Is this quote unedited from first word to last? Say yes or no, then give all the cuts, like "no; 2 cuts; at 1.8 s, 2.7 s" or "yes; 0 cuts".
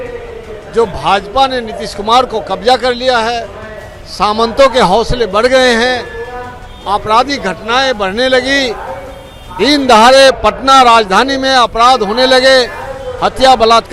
yes; 0 cuts